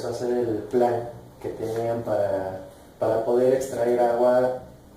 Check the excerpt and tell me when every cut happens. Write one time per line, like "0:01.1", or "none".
none

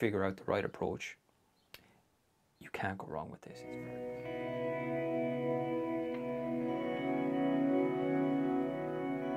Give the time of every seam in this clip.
0:03.9

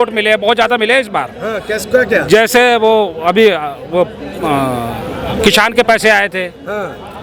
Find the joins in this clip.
none

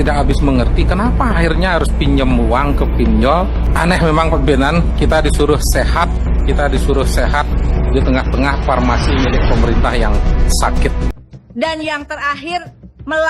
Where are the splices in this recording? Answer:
0:03.6
0:11.1

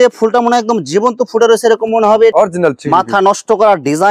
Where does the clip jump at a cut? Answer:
0:02.3

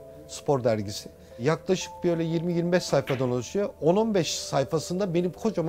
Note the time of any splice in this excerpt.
0:01.3

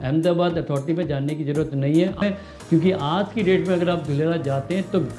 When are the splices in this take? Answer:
0:02.2

